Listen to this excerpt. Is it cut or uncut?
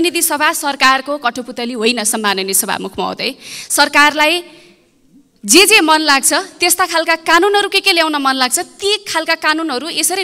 uncut